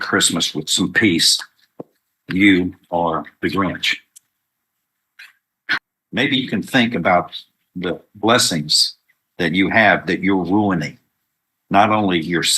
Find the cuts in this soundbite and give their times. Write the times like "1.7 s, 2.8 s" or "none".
5.8 s